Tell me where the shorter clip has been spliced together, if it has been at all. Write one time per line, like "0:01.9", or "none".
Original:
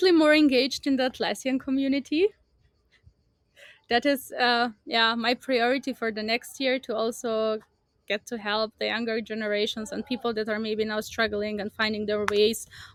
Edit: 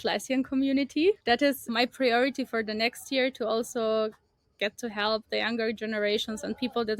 0:01.7